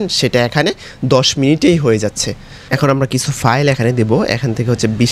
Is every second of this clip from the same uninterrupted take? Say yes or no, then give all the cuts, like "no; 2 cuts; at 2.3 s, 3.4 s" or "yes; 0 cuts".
no; 1 cut; at 2.7 s